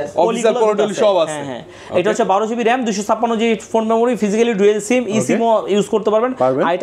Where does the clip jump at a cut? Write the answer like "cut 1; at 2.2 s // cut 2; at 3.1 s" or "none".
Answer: none